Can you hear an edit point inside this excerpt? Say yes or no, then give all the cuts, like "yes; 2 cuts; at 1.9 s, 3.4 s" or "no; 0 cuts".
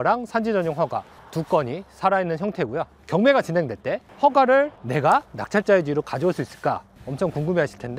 no; 0 cuts